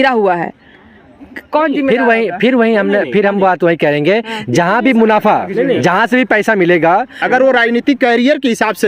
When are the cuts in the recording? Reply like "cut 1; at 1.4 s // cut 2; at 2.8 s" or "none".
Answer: cut 1; at 7.2 s